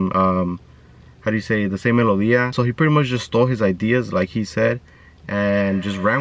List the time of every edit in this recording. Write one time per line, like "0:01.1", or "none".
0:02.5